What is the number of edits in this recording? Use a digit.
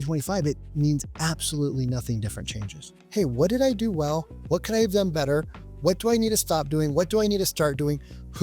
1